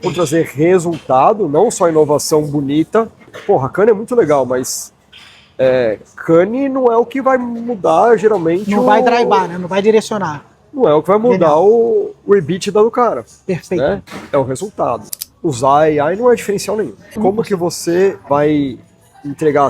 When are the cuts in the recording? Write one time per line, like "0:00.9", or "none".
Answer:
0:03.3
0:15.1
0:17.2
0:18.2